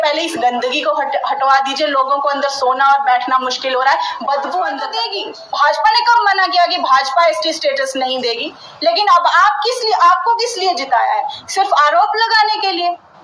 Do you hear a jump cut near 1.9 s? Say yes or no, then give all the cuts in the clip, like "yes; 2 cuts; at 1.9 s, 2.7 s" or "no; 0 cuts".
no; 1 cut; at 5.0 s